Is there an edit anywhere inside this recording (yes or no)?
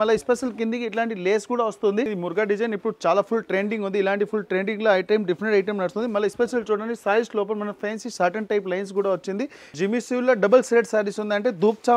yes